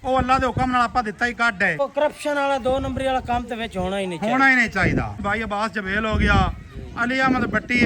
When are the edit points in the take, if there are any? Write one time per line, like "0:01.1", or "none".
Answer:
0:01.8
0:05.2